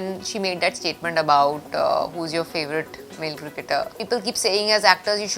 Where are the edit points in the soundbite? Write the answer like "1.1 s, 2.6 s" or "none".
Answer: 4.0 s